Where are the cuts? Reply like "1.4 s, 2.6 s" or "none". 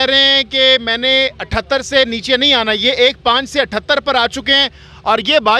none